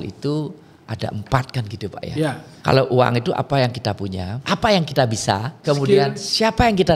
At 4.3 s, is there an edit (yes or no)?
yes